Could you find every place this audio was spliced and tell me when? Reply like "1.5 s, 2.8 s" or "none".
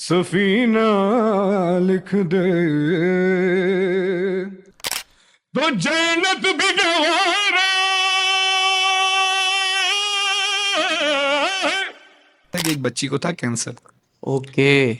12.5 s